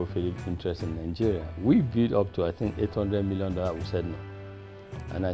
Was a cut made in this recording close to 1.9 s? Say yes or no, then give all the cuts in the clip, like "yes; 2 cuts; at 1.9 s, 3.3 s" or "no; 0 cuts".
yes; 1 cut; at 1.9 s